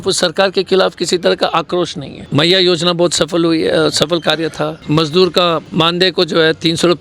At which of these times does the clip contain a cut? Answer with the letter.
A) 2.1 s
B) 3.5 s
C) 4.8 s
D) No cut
C